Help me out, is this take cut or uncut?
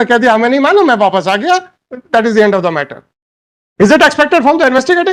uncut